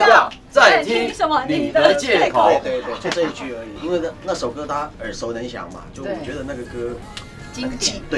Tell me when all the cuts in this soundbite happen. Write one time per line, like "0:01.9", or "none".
none

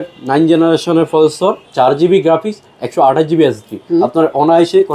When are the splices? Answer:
0:01.6
0:03.8

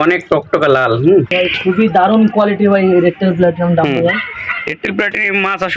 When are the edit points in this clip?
0:01.3

